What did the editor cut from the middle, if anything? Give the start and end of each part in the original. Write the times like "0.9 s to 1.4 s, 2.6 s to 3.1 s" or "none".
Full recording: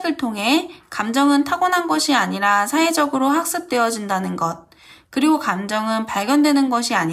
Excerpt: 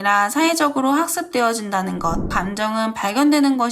4.7 s to 5.5 s